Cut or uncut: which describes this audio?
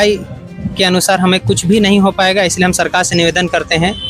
uncut